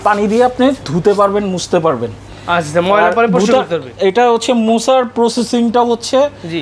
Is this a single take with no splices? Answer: yes; 0 cuts

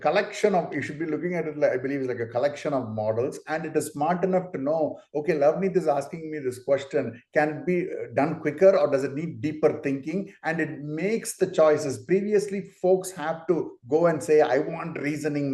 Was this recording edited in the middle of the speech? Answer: no; 0 cuts

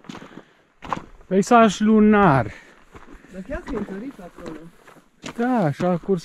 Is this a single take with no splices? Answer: yes; 0 cuts

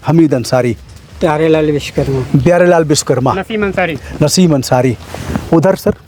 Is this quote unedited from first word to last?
yes; 0 cuts

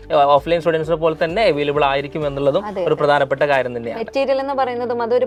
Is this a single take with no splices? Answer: yes; 0 cuts

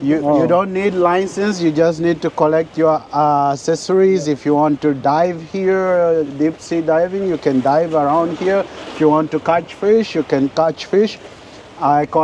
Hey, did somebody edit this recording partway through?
no; 0 cuts

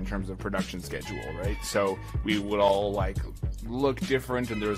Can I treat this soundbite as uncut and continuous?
yes; 0 cuts

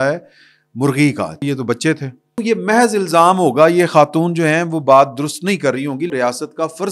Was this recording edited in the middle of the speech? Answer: yes; 3 cuts; at 1.4 s, 2.4 s, 6.1 s

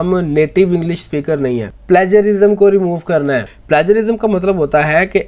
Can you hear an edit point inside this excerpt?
yes; 2 cuts; at 1.7 s, 3.5 s

